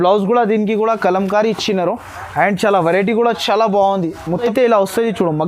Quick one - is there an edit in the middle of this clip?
yes; 1 cut; at 4.4 s

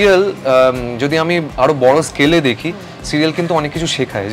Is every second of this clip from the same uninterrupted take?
yes; 0 cuts

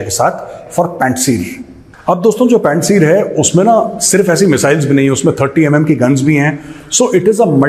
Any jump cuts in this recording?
no; 0 cuts

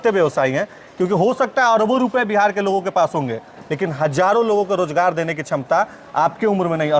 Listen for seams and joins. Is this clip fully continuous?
yes; 0 cuts

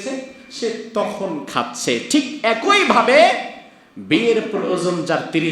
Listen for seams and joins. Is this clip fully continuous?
yes; 0 cuts

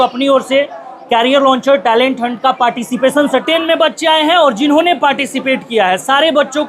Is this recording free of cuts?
no; 1 cut; at 3.4 s

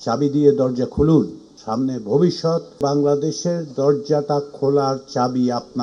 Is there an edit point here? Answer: no; 0 cuts

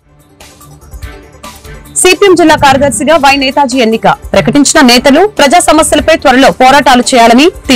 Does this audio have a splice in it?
no; 0 cuts

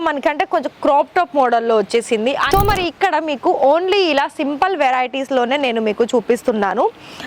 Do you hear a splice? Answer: yes; 1 cut; at 2.4 s

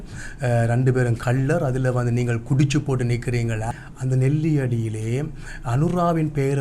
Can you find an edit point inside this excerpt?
yes; 1 cut; at 3.7 s

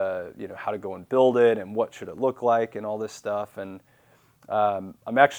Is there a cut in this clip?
no; 0 cuts

